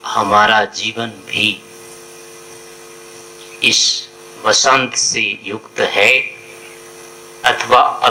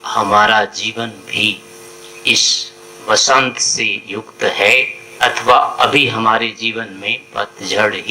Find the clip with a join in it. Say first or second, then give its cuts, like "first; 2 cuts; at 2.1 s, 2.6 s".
second; 2 cuts; at 1.9 s, 5.0 s